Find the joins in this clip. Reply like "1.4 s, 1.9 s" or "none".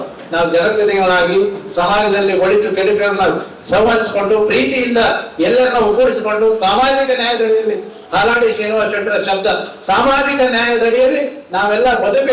none